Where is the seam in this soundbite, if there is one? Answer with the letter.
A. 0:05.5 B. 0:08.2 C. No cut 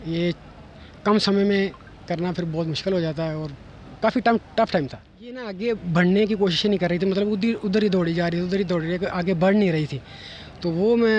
A